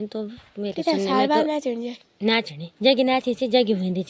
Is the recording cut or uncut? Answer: uncut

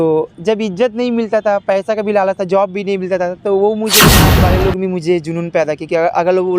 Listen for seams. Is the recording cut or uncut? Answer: cut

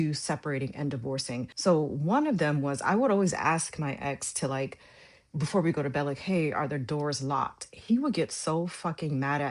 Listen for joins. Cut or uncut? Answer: cut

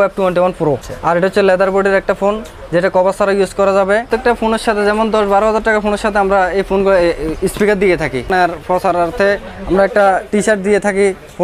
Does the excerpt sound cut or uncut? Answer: cut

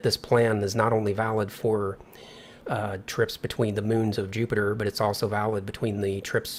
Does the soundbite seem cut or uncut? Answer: uncut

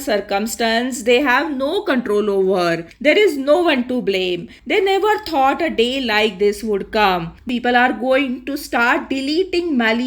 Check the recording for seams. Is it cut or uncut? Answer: cut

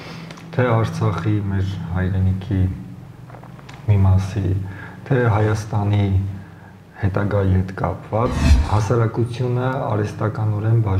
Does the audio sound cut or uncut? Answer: cut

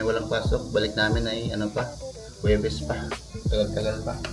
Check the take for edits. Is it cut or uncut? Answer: uncut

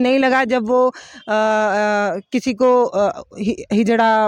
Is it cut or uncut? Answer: uncut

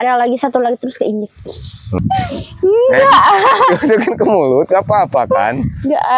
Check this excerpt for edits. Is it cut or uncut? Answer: cut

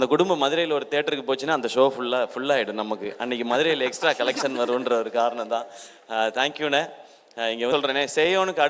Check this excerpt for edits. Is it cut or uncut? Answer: cut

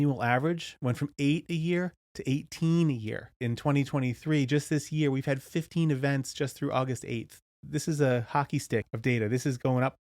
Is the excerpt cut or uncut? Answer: cut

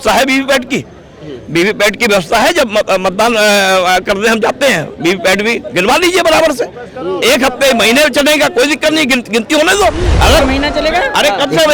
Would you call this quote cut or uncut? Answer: uncut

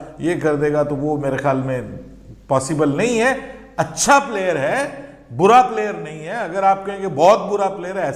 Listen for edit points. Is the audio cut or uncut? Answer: uncut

